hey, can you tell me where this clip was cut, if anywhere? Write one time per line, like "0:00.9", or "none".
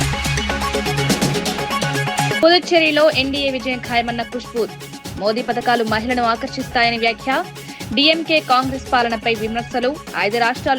0:02.4